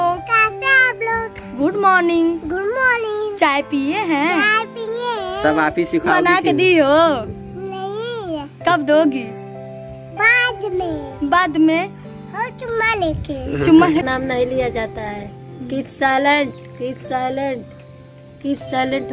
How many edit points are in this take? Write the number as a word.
one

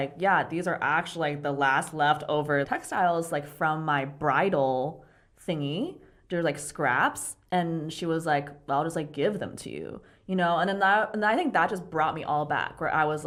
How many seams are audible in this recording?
zero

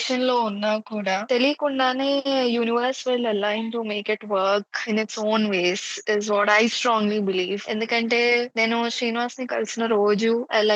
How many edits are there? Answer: zero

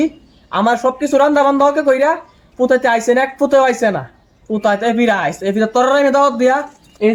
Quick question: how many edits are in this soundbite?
zero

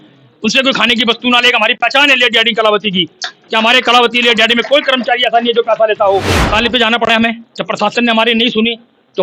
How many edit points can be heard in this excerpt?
one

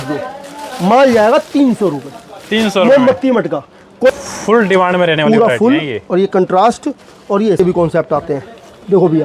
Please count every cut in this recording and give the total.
two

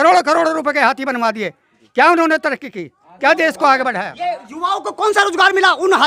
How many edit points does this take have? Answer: zero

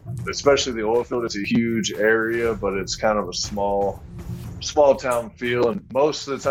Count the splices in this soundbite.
zero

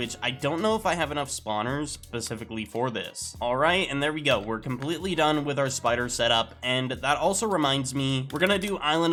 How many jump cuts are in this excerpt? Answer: zero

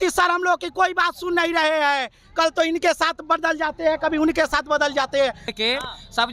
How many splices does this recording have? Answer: one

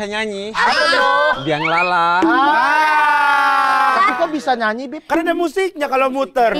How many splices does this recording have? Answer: one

